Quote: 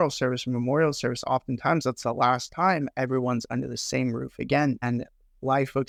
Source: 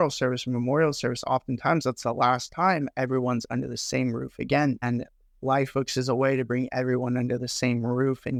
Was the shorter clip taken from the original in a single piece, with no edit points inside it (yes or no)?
yes